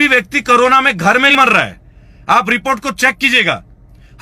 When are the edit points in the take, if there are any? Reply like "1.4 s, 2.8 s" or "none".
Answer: 1.3 s